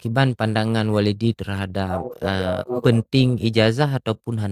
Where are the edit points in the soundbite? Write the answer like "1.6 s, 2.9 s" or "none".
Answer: none